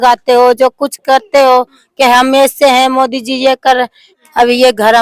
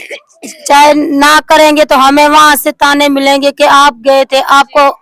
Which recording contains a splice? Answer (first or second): first